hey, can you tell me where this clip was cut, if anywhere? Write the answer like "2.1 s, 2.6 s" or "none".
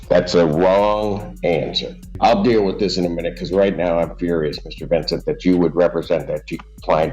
2.2 s